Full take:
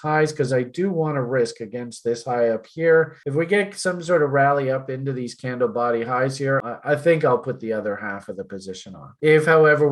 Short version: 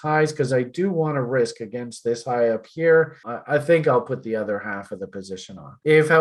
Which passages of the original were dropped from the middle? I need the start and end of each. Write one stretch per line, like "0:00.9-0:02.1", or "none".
0:03.3-0:06.6